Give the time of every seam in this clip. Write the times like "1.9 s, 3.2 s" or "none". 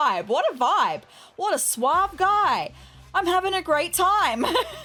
none